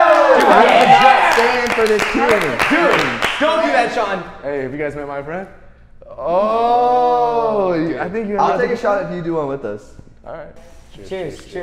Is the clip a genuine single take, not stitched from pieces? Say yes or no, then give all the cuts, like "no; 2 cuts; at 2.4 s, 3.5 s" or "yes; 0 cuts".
yes; 0 cuts